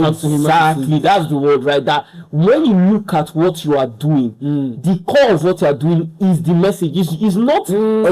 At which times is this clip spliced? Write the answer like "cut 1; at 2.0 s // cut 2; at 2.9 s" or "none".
none